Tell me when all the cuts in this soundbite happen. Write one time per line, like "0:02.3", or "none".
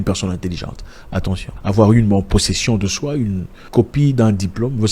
0:01.5